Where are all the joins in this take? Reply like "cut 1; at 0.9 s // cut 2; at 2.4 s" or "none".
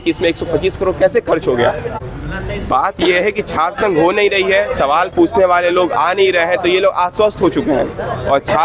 cut 1; at 2.0 s